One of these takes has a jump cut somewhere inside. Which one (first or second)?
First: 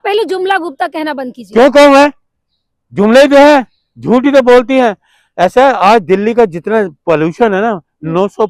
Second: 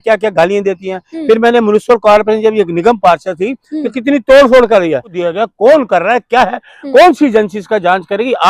second